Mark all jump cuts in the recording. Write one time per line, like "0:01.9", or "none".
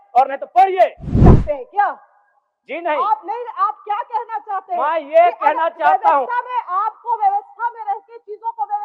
0:01.1